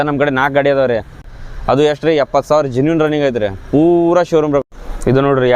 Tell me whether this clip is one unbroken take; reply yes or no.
no